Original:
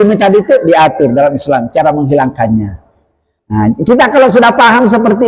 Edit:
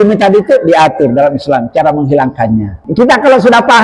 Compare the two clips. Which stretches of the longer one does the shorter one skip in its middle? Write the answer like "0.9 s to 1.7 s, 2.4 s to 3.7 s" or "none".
2.9 s to 3.8 s